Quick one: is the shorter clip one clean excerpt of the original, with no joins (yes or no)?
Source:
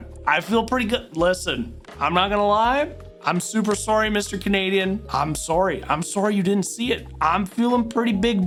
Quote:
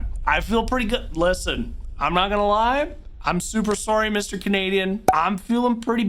no